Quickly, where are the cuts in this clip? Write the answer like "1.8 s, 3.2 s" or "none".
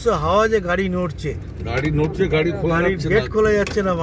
none